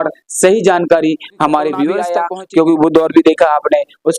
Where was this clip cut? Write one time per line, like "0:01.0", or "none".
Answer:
0:02.1